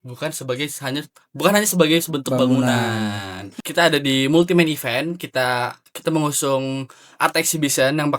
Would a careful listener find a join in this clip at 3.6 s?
yes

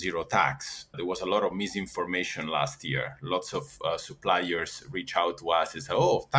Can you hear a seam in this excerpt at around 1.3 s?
no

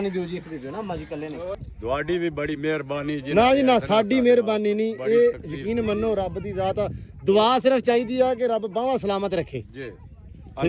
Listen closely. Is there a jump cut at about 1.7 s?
yes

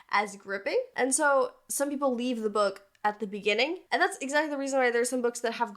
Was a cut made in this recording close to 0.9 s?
yes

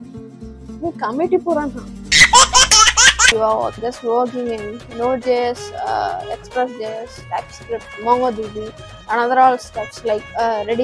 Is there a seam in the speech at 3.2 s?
yes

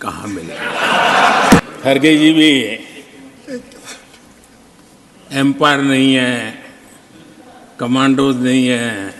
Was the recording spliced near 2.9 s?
no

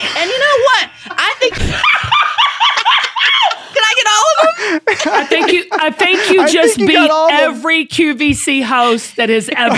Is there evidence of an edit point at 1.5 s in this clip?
yes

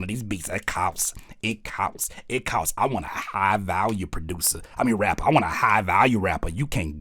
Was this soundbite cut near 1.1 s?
no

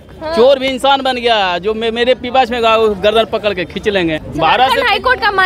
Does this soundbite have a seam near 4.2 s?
yes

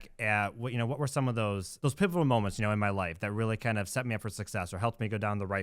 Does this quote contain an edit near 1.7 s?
yes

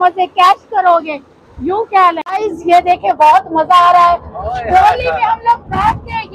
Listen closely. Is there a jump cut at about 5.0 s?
no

